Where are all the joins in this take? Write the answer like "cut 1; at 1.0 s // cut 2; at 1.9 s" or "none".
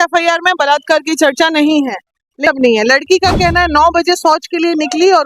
cut 1; at 2.5 s